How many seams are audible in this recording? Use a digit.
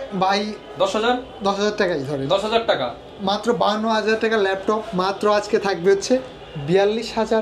0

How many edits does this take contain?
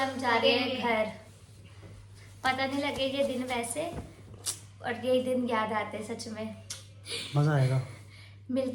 0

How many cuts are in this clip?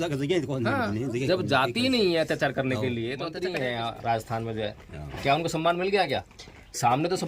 1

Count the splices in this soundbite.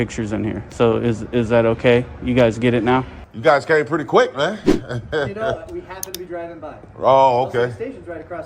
1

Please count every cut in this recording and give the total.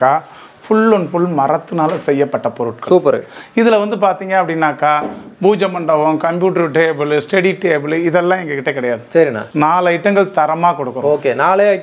0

